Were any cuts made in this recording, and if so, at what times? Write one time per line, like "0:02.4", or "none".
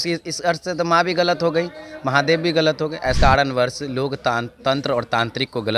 0:03.2

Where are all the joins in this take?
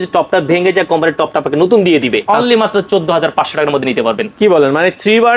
0:02.2

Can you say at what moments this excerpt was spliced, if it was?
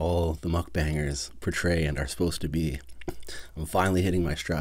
none

